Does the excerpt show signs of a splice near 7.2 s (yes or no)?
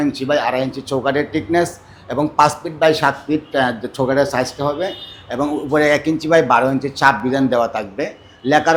no